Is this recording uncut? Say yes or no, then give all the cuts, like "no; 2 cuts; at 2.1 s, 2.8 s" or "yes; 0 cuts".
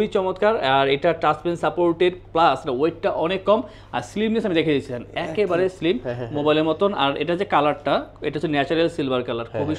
yes; 0 cuts